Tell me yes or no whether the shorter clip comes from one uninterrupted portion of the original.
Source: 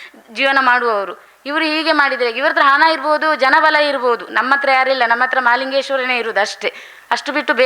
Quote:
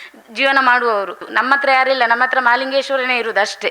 no